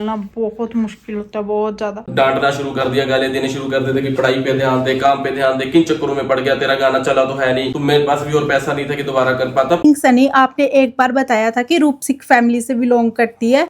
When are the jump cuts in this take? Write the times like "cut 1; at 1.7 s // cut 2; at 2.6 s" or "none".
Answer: cut 1; at 2.0 s // cut 2; at 9.8 s